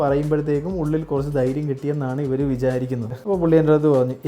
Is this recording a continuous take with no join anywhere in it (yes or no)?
no